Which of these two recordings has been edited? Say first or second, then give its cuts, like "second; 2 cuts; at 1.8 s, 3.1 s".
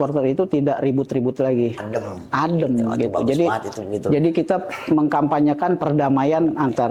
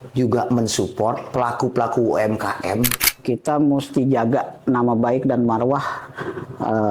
second; 1 cut; at 3.0 s